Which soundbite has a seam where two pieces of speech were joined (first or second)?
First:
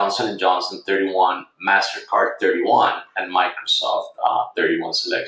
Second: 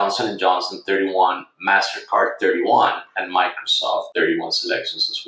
second